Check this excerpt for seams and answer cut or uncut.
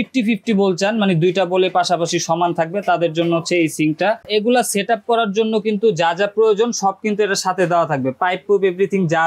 cut